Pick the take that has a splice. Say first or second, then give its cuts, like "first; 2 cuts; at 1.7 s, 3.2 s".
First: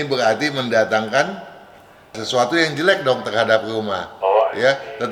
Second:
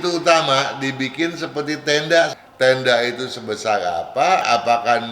second; 2 cuts; at 2.3 s, 4.4 s